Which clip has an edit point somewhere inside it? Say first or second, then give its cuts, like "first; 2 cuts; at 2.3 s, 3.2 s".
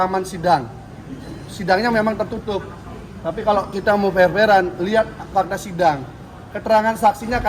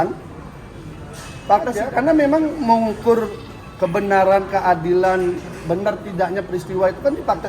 second; 1 cut; at 1.8 s